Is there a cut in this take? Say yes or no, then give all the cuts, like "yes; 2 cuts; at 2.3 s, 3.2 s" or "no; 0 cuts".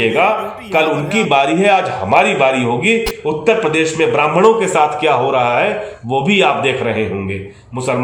no; 0 cuts